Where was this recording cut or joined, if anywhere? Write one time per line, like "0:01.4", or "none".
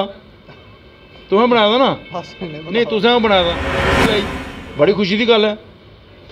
0:03.9